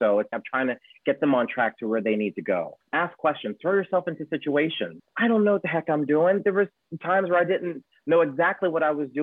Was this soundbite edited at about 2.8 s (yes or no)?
yes